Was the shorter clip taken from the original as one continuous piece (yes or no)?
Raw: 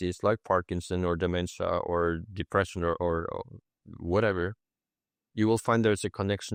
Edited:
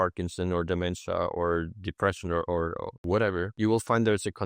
no